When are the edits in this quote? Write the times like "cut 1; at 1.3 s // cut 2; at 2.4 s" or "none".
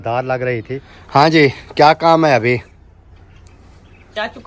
cut 1; at 0.9 s